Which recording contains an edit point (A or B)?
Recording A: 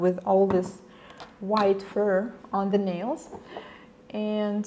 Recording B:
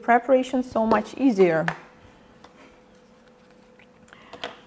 A